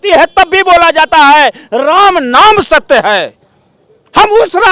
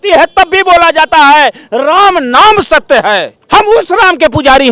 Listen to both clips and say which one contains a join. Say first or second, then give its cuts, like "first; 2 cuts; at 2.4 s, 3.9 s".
second; 1 cut; at 3.3 s